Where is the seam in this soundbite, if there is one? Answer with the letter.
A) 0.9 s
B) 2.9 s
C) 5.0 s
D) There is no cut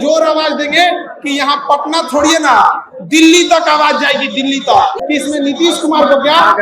C